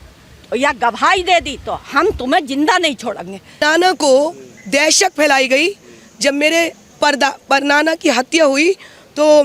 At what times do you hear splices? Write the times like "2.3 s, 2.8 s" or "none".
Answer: 3.6 s